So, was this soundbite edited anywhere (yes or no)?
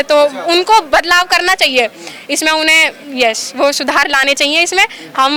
no